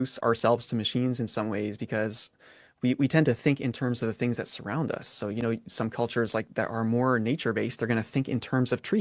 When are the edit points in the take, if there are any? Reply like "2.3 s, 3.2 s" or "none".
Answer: none